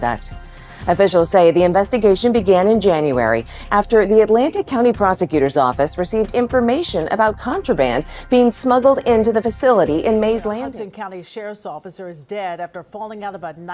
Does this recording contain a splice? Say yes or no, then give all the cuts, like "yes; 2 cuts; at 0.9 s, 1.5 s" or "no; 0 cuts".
yes; 1 cut; at 10.6 s